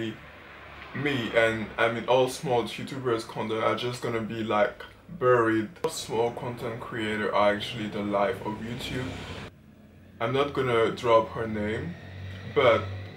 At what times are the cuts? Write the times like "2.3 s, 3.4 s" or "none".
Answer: 5.8 s, 9.5 s